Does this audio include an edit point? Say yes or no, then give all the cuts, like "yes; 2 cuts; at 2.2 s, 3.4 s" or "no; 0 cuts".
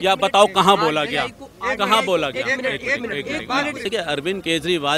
yes; 1 cut; at 3.8 s